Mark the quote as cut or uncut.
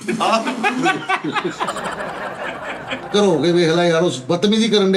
cut